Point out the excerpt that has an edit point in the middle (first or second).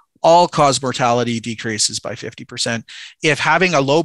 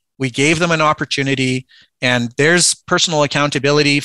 first